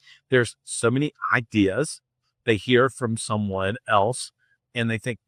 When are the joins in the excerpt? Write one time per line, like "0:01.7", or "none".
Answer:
none